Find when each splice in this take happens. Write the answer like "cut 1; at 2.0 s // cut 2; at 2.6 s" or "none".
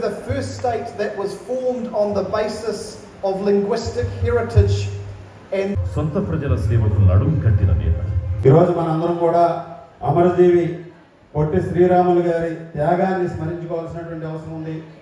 cut 1; at 5.7 s // cut 2; at 8.4 s

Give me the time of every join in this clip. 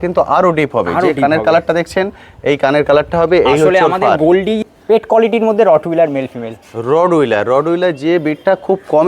cut 1; at 4.6 s

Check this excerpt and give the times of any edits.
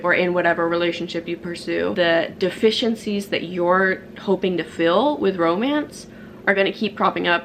cut 1; at 1.9 s

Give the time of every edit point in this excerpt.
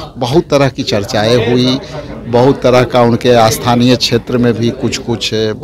none

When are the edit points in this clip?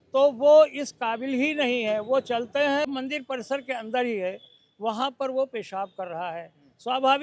cut 1; at 2.9 s

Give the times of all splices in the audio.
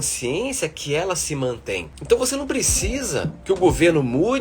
cut 1; at 1.9 s // cut 2; at 3.3 s

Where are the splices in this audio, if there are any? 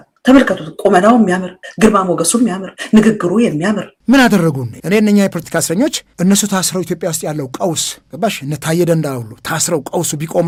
none

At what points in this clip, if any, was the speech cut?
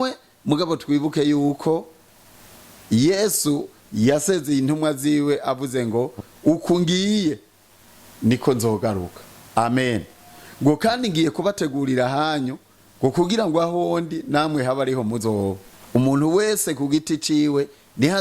cut 1; at 15.7 s

